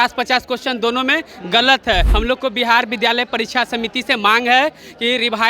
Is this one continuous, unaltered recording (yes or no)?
no